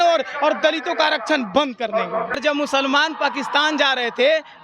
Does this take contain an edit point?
yes; 1 cut; at 2.4 s

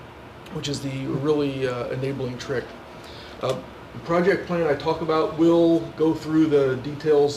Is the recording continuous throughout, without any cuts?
no; 1 cut; at 5.3 s

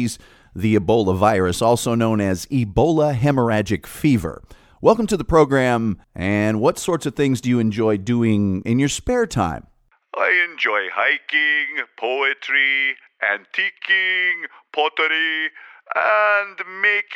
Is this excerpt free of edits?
no; 1 cut; at 6.1 s

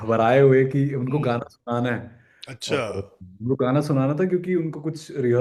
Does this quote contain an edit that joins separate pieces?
no; 0 cuts

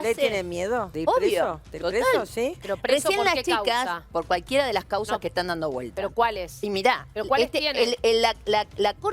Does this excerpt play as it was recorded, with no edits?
no; 2 cuts; at 0.9 s, 2.7 s

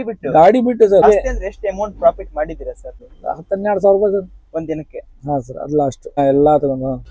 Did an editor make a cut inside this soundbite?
yes; 3 cuts; at 1.0 s, 3.2 s, 6.2 s

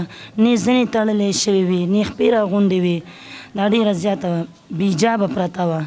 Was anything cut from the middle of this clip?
no; 0 cuts

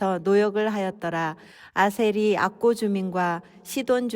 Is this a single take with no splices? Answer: no; 1 cut; at 1.4 s

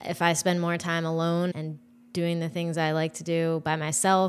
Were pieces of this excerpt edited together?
yes; 1 cut; at 1.5 s

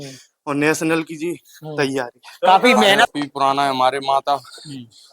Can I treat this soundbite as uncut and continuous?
no; 1 cut; at 3.1 s

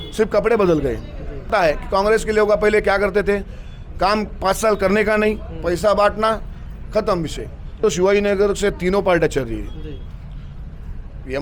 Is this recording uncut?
no; 2 cuts; at 1.5 s, 7.8 s

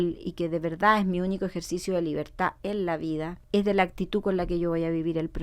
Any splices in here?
yes; 1 cut; at 3.4 s

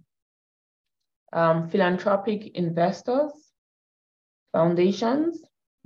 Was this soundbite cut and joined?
no; 0 cuts

